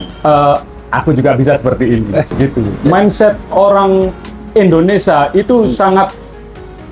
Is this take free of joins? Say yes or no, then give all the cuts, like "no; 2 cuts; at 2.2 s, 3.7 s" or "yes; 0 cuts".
no; 1 cut; at 2.7 s